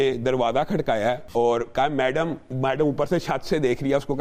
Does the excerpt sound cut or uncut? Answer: cut